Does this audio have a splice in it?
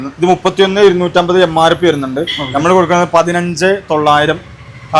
no; 0 cuts

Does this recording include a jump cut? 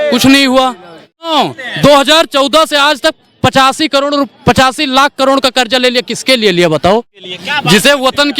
yes; 2 cuts; at 1.3 s, 7.2 s

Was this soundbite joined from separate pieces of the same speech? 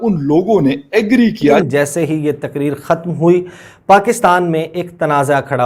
yes; 1 cut; at 1.6 s

